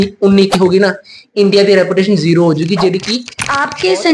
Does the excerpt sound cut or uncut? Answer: cut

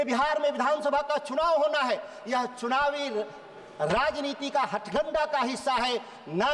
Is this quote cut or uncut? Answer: uncut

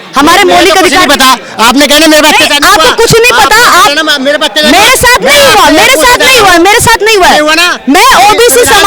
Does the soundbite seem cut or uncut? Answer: uncut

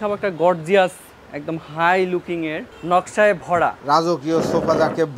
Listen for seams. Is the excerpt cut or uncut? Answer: cut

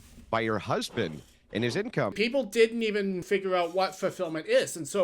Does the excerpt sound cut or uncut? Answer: cut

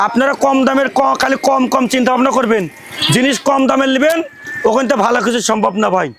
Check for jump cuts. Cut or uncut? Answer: uncut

